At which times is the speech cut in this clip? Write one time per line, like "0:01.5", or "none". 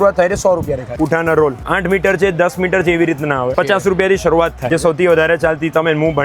0:00.9
0:01.6
0:03.5
0:04.7